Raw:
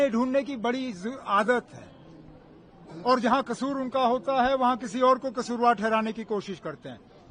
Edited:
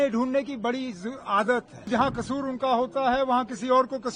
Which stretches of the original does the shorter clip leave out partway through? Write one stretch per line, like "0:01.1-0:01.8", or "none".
0:01.9-0:03.2